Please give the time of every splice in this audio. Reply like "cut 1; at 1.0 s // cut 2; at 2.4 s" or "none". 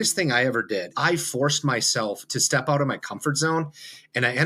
cut 1; at 0.9 s